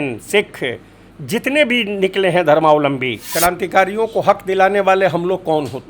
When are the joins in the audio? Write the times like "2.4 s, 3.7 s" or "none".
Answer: 3.2 s